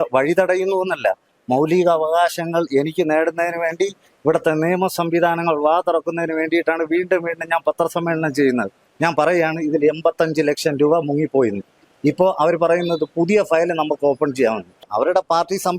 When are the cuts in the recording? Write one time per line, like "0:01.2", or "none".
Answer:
0:08.8
0:14.9